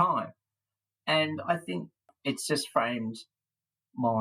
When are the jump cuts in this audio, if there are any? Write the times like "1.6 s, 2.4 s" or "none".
2.1 s